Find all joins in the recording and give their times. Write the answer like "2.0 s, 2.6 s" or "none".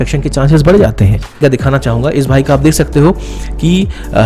1.4 s